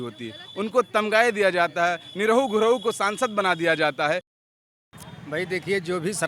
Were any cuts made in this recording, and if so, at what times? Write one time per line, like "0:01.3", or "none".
0:04.6